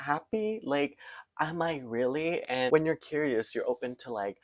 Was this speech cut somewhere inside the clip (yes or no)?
yes